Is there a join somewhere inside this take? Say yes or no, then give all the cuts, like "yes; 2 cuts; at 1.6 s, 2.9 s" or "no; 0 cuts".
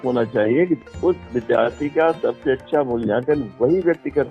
no; 0 cuts